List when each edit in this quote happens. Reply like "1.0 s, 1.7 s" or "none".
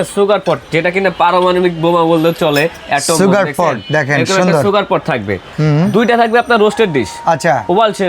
5.5 s

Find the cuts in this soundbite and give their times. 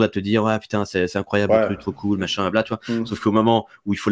none

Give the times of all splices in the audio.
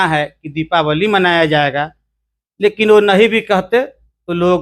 none

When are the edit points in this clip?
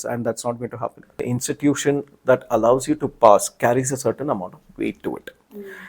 1.1 s

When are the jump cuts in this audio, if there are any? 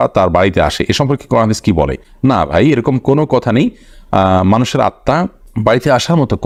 none

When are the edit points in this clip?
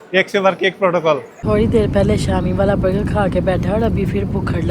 1.5 s

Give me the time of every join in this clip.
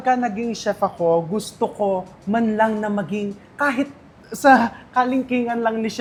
none

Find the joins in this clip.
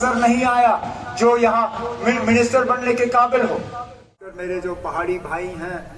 4.1 s

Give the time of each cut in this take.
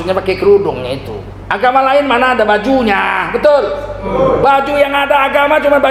none

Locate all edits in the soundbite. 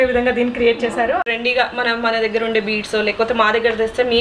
1.2 s

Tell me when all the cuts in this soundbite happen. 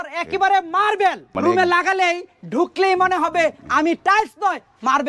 1.3 s

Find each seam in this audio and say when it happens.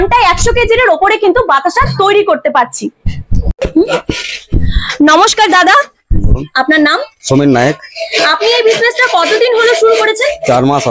none

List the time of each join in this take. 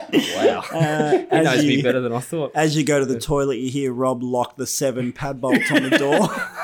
none

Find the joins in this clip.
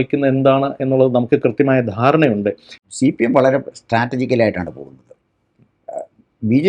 2.7 s

